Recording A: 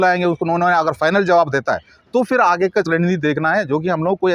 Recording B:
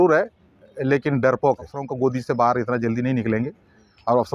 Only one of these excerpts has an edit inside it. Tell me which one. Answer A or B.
B